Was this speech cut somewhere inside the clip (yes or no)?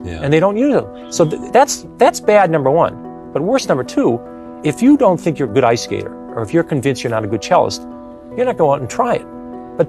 no